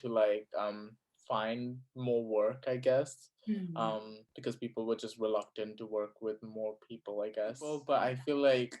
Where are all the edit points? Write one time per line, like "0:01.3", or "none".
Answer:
0:07.8

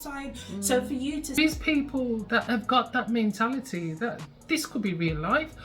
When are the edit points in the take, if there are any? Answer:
0:01.4

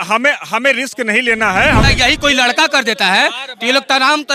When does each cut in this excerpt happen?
0:01.8

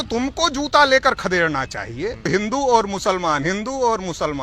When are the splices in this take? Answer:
0:02.3

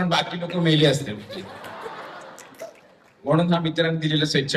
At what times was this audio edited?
none

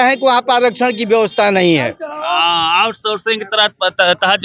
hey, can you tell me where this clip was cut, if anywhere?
none

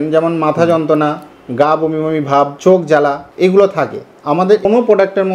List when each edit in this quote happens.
0:02.5
0:03.2
0:04.6

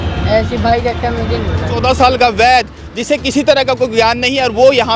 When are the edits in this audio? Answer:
0:01.8

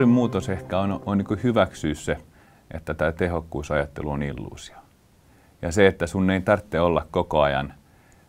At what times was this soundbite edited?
0:01.0

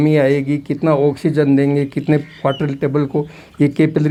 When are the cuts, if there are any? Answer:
none

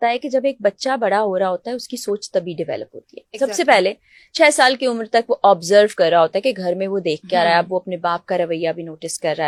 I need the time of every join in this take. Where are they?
none

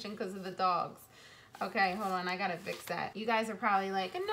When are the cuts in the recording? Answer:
0:03.1

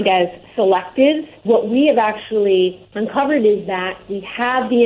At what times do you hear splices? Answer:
0:01.4
0:02.9

